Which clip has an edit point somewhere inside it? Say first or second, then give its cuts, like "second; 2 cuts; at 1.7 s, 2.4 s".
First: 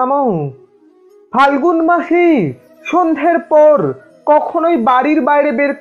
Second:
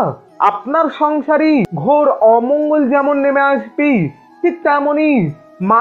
second; 1 cut; at 1.7 s